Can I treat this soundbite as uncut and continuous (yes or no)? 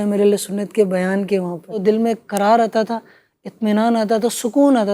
no